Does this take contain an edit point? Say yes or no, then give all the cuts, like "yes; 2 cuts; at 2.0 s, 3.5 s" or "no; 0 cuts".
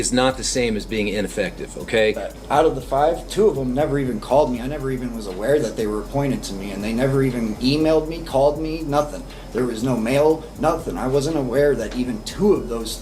yes; 1 cut; at 2.3 s